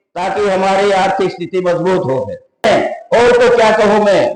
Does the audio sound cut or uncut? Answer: cut